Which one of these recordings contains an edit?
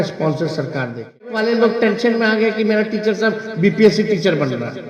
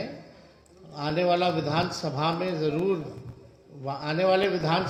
first; 1 cut; at 1.4 s

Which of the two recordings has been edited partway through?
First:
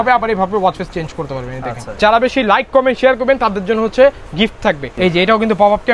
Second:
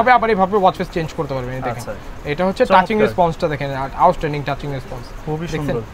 first; 2 cuts; at 1.9 s, 4.9 s

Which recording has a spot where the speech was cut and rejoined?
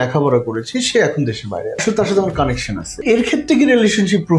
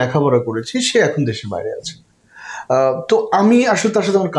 first; 2 cuts; at 1.8 s, 3.0 s

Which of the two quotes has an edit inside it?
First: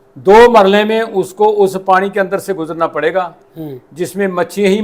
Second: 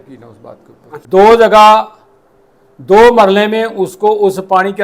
second; 1 cut; at 0.9 s

